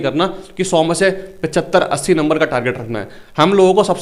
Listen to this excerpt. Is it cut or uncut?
uncut